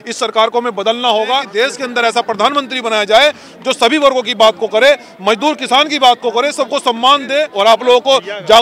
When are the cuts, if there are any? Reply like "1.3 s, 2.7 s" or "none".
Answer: 1.5 s, 7.5 s